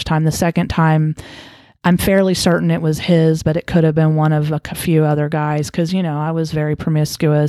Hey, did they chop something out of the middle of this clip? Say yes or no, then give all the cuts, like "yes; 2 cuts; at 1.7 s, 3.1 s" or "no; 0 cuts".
no; 0 cuts